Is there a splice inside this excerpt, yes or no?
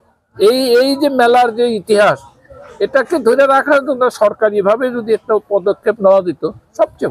no